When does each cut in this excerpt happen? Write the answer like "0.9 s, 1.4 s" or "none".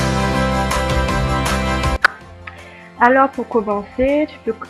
1.6 s